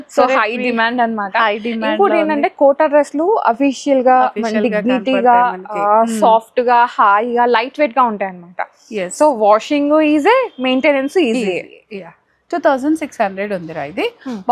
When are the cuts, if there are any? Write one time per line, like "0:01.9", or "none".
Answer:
none